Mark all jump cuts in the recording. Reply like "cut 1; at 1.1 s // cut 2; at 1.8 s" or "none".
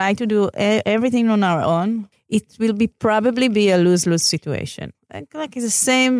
cut 1; at 2.1 s // cut 2; at 4.9 s